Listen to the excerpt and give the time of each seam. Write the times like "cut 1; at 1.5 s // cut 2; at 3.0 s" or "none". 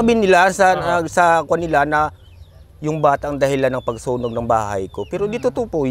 none